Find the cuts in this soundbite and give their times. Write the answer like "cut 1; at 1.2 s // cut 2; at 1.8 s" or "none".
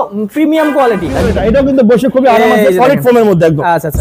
cut 1; at 1.3 s